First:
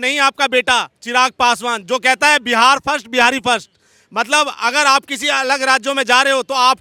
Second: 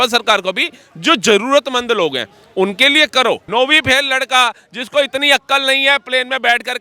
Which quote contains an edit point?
second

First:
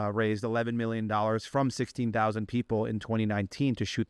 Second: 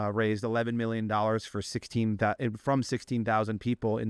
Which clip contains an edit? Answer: first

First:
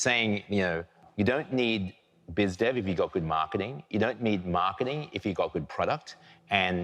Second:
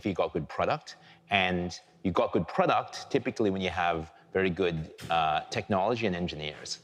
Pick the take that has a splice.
first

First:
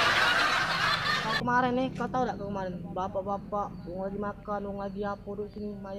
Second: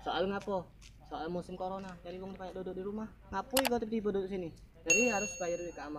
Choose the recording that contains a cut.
first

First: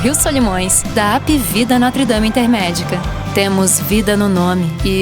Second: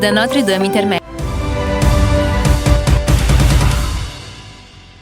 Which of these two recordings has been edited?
second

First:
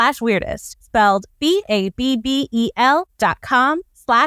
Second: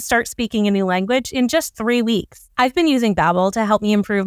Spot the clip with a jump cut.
second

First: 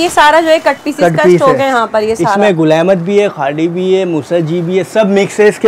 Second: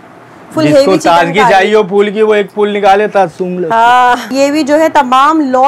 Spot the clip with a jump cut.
second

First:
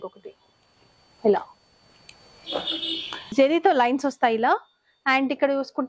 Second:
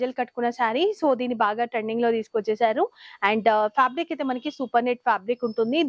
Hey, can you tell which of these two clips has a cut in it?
first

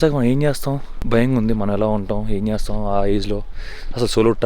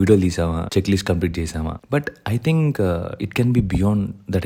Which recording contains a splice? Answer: first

